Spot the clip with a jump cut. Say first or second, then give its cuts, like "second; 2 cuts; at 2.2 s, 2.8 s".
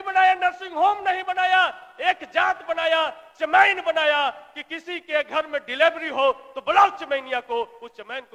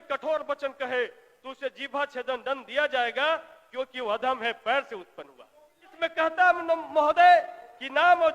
second; 1 cut; at 5.9 s